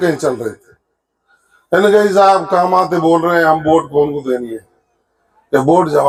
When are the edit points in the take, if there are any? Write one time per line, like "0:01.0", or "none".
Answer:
none

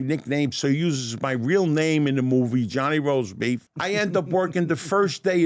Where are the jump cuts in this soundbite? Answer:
0:03.7

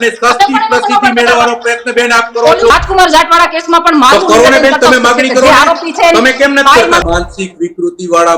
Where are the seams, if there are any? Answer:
0:02.7
0:07.0

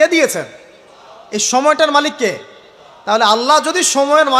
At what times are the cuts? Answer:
none

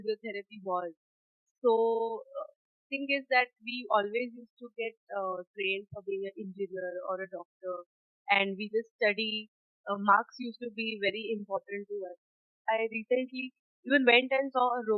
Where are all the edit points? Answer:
0:12.7

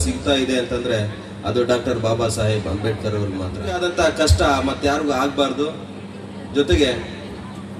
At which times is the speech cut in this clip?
0:03.8

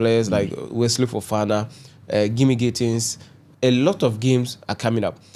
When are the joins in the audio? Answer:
0:03.4

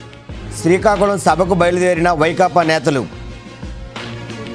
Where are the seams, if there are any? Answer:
none

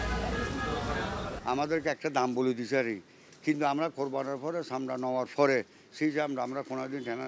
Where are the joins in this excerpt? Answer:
0:01.3

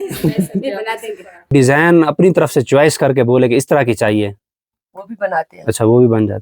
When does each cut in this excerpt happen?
0:01.5

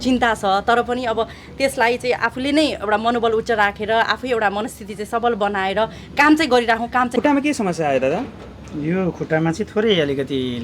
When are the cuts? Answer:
0:07.1

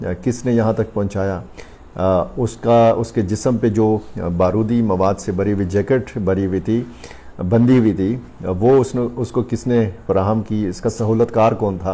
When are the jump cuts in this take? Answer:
0:01.6

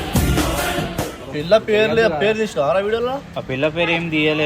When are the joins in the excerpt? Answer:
0:01.3

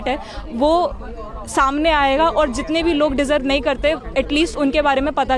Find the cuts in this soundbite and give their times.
none

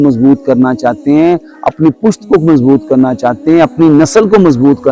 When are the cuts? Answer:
none

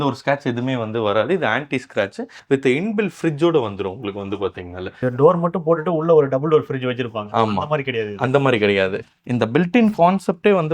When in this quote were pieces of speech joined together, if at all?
0:02.3
0:05.0
0:09.0

